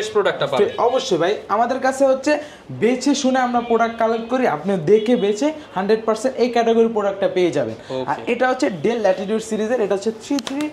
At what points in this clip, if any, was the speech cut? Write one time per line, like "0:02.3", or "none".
none